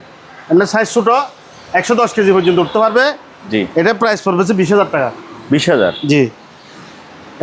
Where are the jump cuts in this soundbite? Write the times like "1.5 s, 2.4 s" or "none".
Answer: none